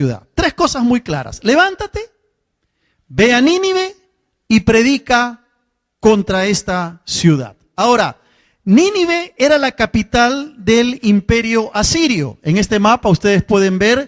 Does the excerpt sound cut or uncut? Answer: uncut